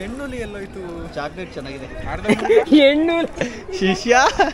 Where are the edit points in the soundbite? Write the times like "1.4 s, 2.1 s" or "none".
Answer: none